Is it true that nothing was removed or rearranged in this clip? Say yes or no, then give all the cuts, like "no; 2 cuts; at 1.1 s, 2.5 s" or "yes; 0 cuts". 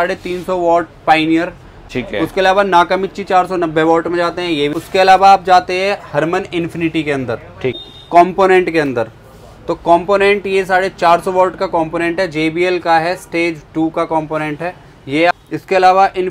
no; 4 cuts; at 1.8 s, 4.8 s, 7.9 s, 15.3 s